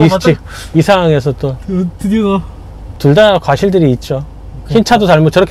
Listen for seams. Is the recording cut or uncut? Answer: cut